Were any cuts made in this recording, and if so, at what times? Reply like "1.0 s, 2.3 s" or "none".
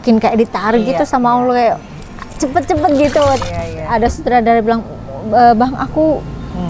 3.4 s

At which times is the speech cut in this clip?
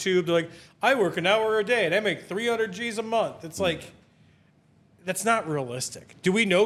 none

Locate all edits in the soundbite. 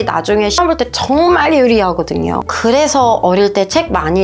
2.5 s

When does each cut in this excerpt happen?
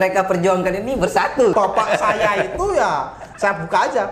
1.5 s

